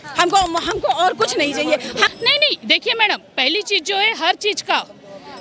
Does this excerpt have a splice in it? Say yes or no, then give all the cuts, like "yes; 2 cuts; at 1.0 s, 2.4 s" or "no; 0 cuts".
yes; 1 cut; at 2.1 s